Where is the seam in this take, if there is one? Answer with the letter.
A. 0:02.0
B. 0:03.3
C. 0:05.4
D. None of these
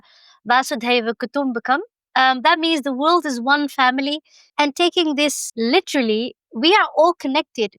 C